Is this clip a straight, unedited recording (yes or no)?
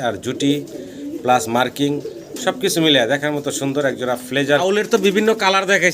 no